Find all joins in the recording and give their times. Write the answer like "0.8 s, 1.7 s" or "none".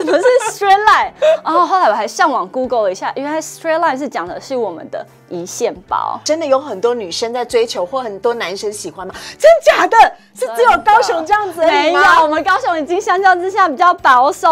6.2 s

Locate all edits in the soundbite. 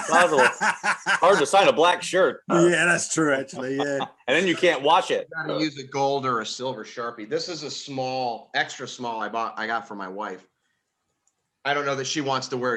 none

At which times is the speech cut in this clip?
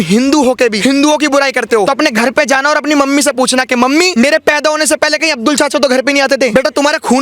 0.8 s, 1.9 s, 4.1 s, 6.5 s

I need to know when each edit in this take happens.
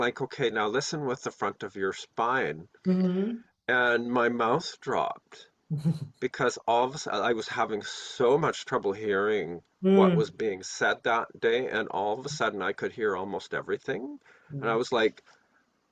none

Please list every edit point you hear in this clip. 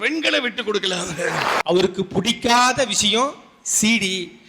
1.6 s

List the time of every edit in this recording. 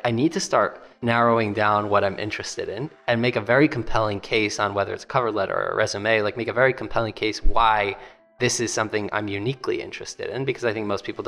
0.9 s

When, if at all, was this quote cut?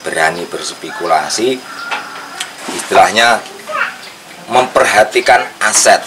none

